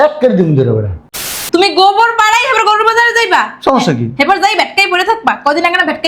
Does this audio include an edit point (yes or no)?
yes